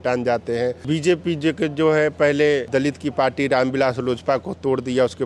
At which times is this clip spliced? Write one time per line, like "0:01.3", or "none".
0:00.8
0:02.7